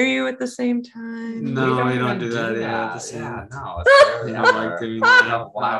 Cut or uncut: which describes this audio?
uncut